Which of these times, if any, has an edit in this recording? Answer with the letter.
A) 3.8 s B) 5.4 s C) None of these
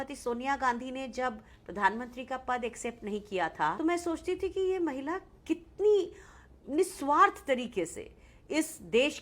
A